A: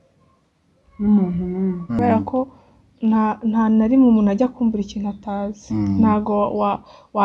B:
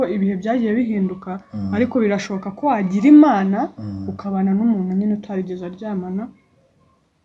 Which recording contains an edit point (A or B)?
A